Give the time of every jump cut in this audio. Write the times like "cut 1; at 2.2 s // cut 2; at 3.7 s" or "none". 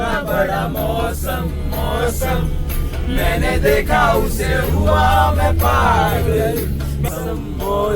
cut 1; at 7.1 s